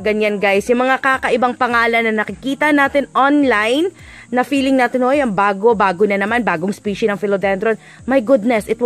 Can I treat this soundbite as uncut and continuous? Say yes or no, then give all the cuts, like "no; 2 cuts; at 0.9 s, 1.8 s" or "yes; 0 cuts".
yes; 0 cuts